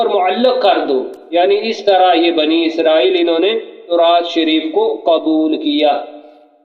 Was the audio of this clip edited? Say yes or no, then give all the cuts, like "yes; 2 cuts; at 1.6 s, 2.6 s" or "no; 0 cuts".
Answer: yes; 1 cut; at 1.2 s